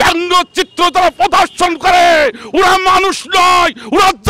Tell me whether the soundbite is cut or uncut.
uncut